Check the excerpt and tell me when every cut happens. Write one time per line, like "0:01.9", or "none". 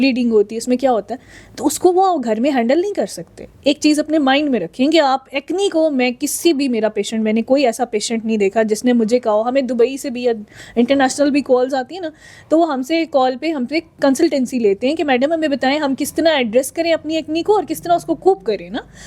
none